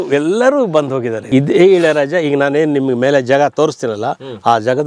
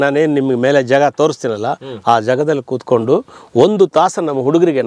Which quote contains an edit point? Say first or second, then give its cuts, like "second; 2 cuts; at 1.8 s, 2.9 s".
first; 1 cut; at 1.2 s